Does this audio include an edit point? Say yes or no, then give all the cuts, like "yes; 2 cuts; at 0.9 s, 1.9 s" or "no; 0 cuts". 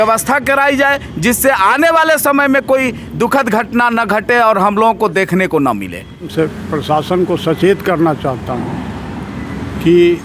yes; 1 cut; at 6.3 s